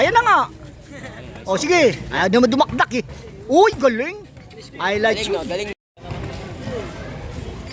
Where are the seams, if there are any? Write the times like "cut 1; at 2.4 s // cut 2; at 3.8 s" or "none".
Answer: cut 1; at 5.9 s